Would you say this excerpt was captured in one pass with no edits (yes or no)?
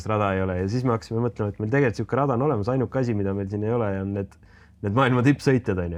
yes